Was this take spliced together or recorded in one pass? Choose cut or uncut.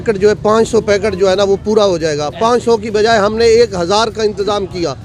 uncut